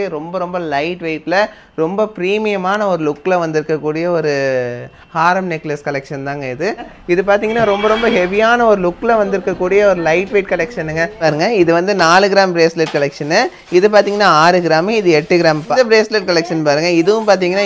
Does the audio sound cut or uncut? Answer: cut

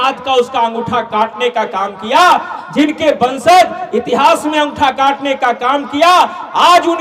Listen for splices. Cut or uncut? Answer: uncut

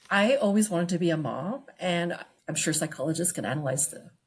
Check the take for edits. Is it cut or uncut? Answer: cut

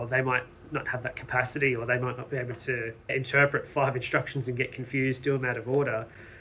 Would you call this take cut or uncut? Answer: uncut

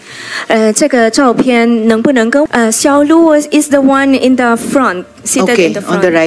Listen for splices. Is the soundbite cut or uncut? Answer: cut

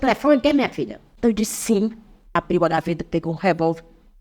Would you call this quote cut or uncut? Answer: cut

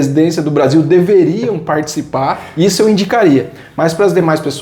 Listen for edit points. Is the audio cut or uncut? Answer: uncut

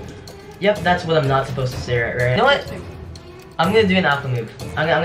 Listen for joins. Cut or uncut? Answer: cut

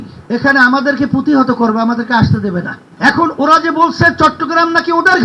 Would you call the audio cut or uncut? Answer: cut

